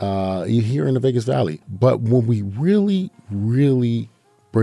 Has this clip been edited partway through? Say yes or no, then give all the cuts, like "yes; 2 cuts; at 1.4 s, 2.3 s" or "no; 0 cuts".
yes; 1 cut; at 1.6 s